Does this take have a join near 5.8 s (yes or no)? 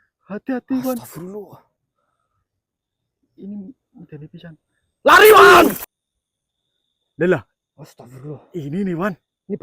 yes